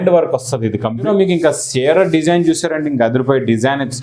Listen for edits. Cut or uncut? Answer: cut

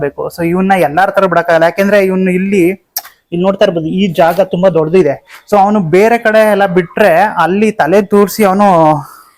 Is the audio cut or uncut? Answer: uncut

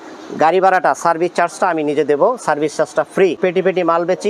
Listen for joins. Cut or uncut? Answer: cut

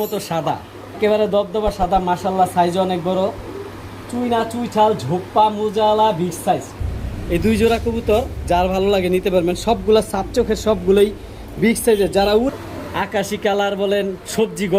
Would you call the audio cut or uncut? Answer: cut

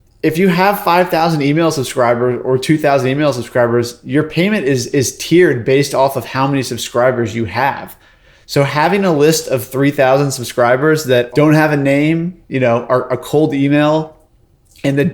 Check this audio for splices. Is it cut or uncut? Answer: cut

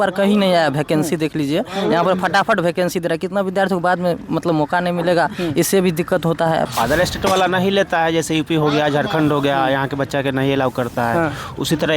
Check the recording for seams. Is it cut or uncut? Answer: cut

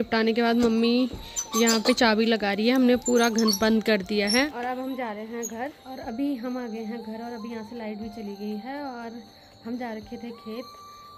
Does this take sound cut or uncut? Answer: uncut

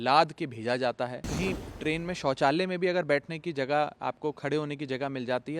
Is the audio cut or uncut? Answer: cut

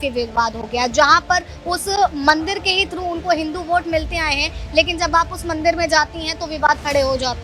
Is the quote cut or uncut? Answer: uncut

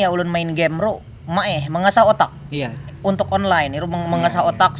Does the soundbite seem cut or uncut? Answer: uncut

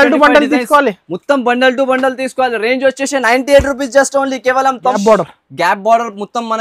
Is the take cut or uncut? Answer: cut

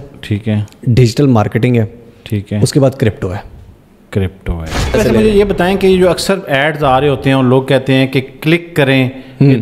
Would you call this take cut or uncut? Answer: cut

